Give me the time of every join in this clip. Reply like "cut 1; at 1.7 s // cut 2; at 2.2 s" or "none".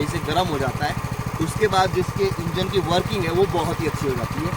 none